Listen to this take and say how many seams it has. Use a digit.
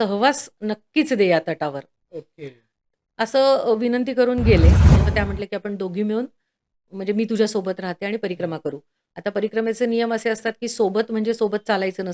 1